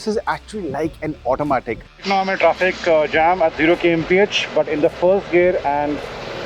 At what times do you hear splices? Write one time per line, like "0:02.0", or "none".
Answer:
0:01.9